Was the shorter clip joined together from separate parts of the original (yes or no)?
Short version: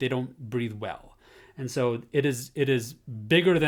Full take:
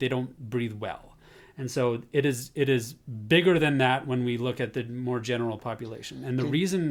no